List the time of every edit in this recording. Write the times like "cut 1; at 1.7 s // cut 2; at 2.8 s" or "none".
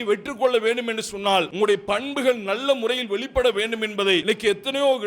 cut 1; at 1.5 s // cut 2; at 4.2 s